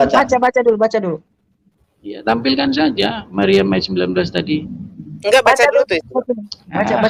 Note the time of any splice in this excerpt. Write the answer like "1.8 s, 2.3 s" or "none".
none